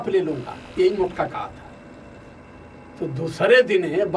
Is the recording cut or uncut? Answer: cut